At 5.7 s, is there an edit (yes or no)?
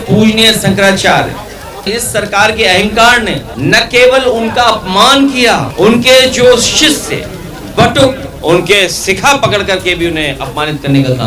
yes